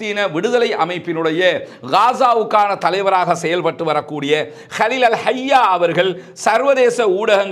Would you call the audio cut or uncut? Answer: uncut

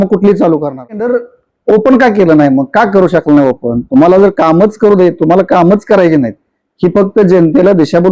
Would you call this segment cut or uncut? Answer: cut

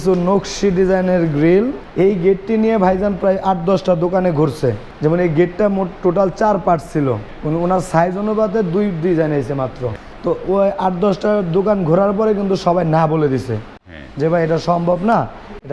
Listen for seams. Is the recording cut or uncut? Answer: cut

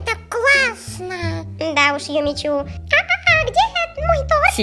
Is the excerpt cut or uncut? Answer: cut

